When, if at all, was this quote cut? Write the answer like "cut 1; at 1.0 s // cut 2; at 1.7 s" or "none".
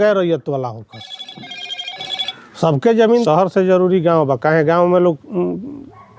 cut 1; at 3.2 s